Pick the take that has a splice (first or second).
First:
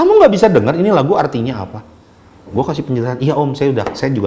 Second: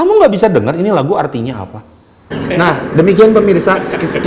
second